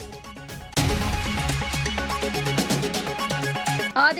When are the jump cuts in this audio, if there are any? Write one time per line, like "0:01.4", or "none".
0:00.7
0:02.1
0:03.4